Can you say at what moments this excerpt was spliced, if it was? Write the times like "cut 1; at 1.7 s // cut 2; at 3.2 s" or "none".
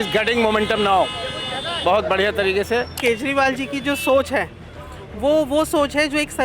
cut 1; at 3.0 s